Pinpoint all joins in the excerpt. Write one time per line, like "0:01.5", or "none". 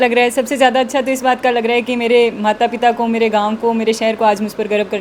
none